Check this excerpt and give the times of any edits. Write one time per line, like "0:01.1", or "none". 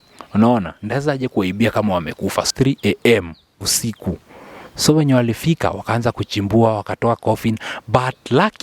0:02.5